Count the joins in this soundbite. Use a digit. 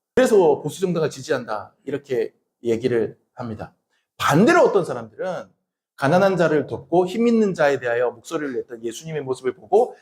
0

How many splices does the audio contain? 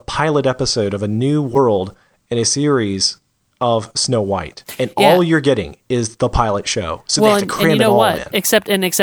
1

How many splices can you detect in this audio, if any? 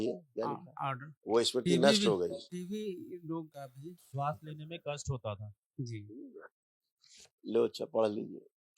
2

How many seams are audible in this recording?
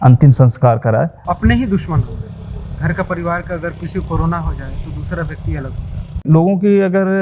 2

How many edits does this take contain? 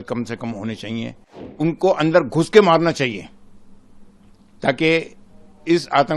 1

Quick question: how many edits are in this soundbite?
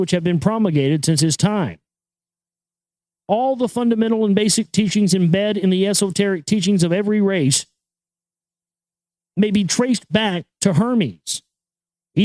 1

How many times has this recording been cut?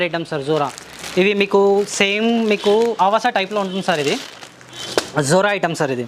0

